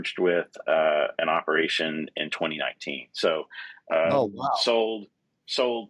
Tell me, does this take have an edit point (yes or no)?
no